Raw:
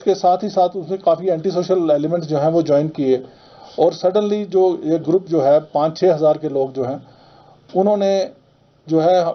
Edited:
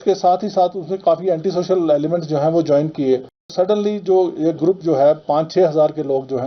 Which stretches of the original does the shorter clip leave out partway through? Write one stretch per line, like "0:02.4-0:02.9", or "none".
0:03.5-0:04.0